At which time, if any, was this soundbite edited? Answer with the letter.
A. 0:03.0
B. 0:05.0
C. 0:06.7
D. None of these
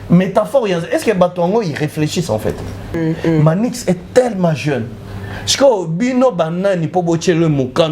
A